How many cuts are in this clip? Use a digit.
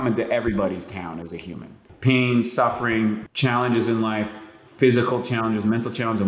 2